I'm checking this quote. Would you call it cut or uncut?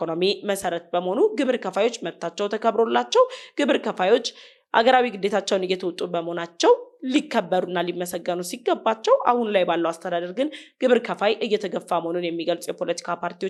uncut